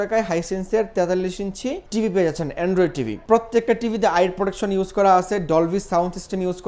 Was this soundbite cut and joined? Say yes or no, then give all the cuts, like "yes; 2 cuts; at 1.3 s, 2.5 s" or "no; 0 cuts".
yes; 2 cuts; at 1.8 s, 3.2 s